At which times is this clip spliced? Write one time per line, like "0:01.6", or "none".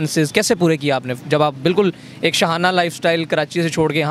none